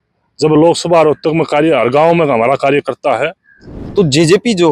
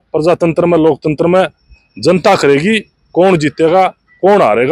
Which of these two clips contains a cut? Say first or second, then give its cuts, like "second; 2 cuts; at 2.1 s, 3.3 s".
first; 1 cut; at 3.7 s